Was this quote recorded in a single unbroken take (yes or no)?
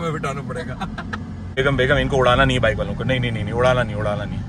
no